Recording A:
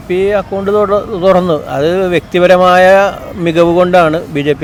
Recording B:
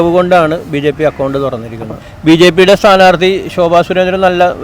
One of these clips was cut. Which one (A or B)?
B